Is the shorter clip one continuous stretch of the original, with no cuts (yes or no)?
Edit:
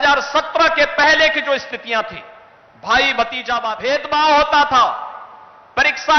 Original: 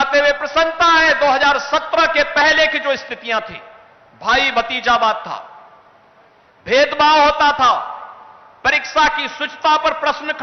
no